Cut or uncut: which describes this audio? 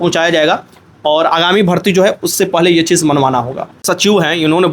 cut